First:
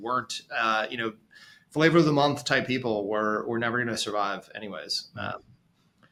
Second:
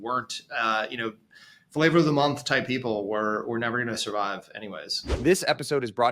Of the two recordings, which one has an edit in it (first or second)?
second